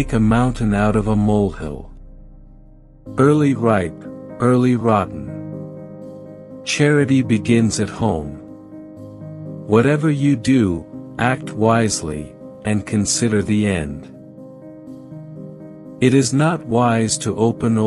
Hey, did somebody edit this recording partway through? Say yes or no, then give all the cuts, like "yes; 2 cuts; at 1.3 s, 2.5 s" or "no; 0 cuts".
yes; 2 cuts; at 14.3 s, 15.9 s